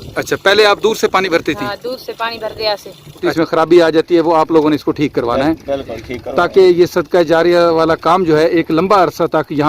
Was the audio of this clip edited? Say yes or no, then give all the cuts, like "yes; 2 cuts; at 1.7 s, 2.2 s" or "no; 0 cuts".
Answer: yes; 1 cut; at 3.3 s